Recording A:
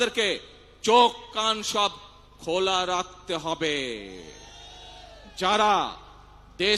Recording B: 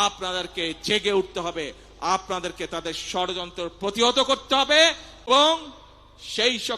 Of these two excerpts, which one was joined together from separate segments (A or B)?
B